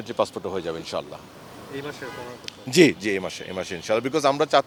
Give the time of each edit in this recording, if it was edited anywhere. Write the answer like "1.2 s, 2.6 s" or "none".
none